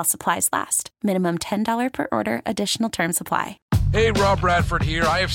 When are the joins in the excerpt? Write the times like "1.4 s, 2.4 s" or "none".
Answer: 3.6 s